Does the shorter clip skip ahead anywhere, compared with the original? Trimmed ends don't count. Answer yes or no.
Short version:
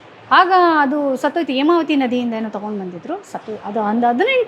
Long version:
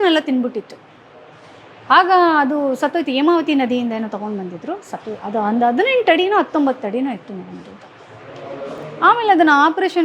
no